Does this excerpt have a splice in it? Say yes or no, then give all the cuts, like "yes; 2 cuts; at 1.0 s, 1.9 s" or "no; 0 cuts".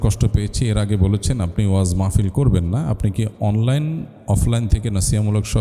no; 0 cuts